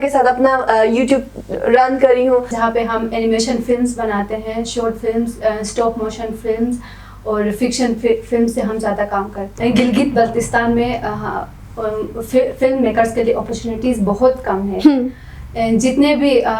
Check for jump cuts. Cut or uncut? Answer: cut